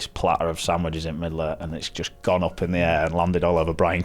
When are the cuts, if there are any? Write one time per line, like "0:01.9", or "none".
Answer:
none